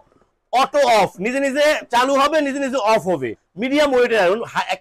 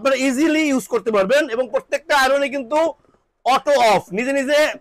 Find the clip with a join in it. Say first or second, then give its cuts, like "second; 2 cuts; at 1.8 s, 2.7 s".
first; 1 cut; at 3.5 s